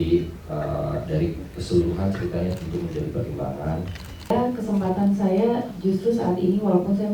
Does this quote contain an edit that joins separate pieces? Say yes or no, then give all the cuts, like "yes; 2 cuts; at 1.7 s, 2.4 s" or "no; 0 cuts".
yes; 1 cut; at 4.3 s